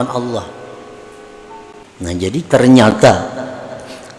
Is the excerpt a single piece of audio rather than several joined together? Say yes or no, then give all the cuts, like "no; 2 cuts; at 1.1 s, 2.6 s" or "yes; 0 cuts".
no; 1 cut; at 1.8 s